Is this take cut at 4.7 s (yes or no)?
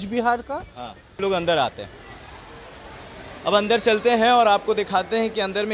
no